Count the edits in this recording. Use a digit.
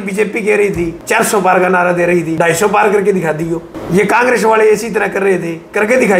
3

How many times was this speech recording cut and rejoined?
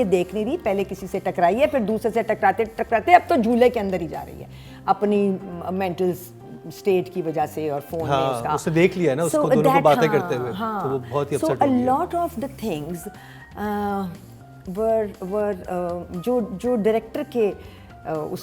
0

